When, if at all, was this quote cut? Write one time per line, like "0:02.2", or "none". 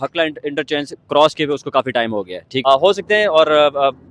0:02.4